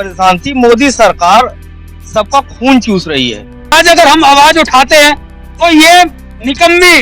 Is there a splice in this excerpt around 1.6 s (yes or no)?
no